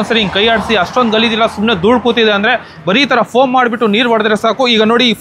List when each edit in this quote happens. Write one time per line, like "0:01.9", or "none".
none